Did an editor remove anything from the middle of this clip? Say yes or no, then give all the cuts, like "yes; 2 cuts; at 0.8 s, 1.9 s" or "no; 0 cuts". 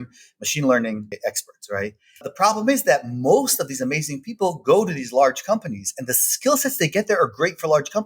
yes; 2 cuts; at 1.1 s, 2.3 s